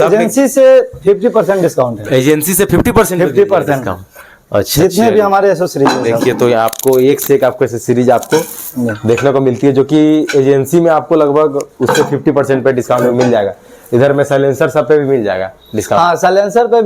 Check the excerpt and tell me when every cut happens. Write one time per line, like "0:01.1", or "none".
none